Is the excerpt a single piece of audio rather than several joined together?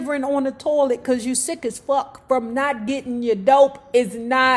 yes; 0 cuts

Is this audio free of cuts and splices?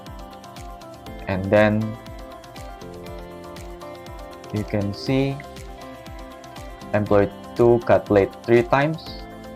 no; 3 cuts; at 1.3 s, 2.6 s, 4.3 s

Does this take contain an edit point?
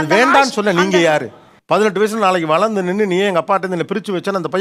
no; 0 cuts

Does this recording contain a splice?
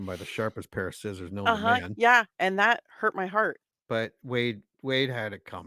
yes; 1 cut; at 3.7 s

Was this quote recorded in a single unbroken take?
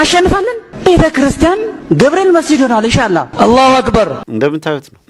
no; 2 cuts; at 3.3 s, 4.2 s

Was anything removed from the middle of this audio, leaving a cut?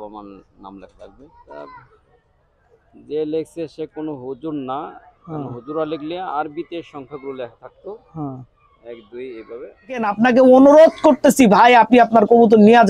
yes; 2 cuts; at 1.4 s, 10.1 s

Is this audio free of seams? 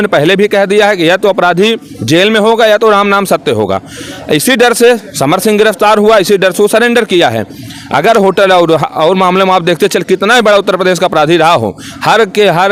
yes; 0 cuts

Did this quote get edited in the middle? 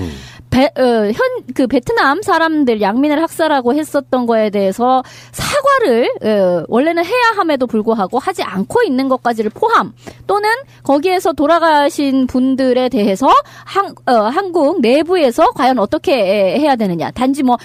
no; 0 cuts

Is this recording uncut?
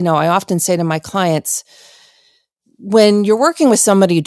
yes; 0 cuts

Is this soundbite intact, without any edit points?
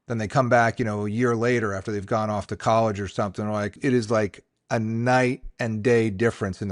no; 1 cut; at 3.8 s

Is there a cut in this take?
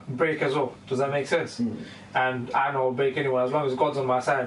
no; 0 cuts

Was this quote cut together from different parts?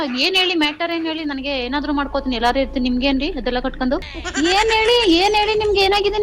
yes; 1 cut; at 4.2 s

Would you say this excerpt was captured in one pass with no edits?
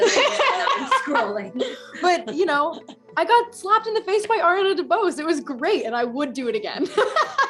yes; 0 cuts

